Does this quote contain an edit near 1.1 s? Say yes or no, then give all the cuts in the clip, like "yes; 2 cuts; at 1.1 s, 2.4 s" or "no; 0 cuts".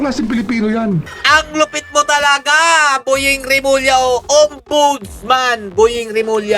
yes; 1 cut; at 1.1 s